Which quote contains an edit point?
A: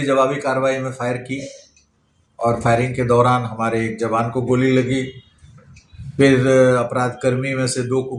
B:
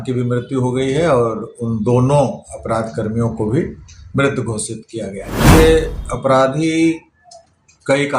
B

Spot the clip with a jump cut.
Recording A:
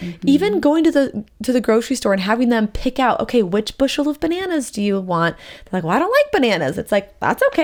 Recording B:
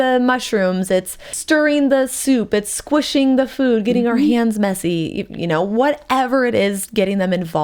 B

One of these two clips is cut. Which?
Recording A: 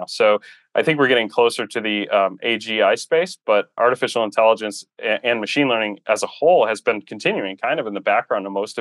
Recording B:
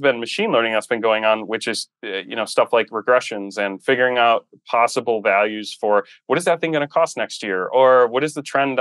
A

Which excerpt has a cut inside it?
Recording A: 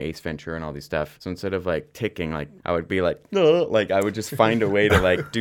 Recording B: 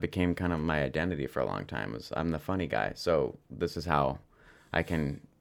A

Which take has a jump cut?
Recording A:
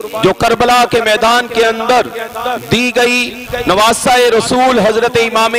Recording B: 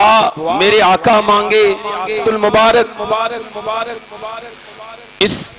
B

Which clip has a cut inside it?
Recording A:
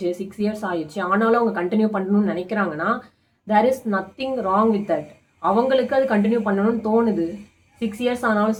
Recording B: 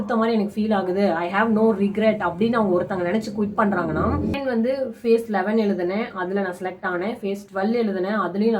B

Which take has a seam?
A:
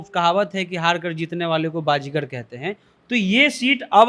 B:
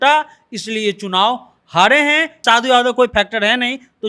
B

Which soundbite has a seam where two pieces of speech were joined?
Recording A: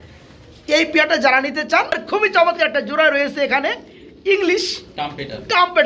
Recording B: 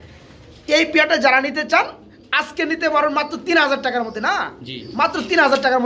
A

